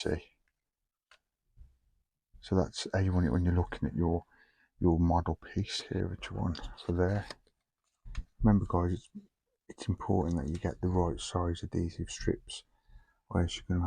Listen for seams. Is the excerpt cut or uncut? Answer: cut